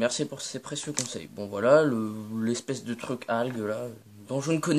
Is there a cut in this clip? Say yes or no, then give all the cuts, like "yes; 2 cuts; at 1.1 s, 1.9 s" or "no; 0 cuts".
yes; 1 cut; at 2.3 s